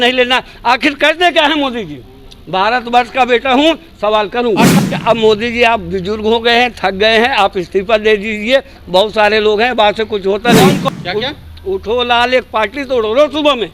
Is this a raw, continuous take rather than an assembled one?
no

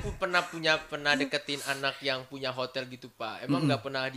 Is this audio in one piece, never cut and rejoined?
yes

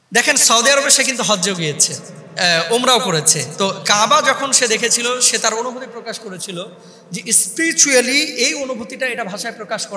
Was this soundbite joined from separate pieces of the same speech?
no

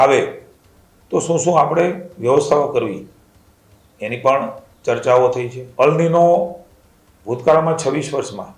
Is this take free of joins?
no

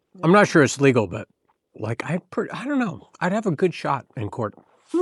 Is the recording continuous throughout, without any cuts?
yes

